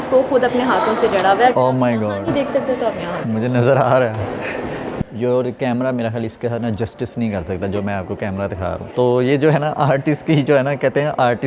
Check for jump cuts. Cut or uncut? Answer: uncut